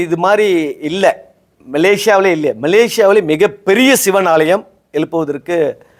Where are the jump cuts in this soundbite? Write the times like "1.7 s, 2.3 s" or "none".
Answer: none